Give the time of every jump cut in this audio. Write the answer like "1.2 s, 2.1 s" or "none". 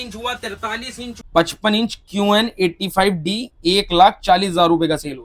1.2 s